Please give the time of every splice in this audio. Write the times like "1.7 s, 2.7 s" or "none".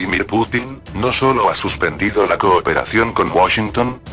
1.2 s